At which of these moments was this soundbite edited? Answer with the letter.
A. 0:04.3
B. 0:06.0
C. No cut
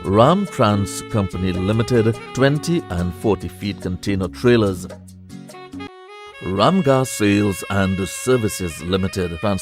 B